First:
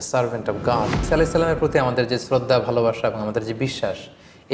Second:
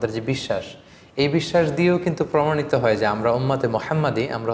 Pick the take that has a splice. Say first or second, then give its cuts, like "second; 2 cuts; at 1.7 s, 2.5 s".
first; 1 cut; at 1.1 s